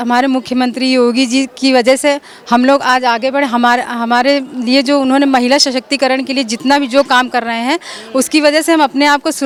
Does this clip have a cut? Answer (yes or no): no